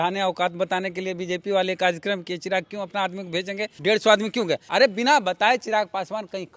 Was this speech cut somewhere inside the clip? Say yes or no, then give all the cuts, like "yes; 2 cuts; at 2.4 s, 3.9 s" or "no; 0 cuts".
yes; 2 cuts; at 3.7 s, 4.6 s